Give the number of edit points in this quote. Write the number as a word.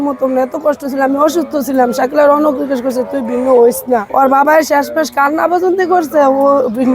one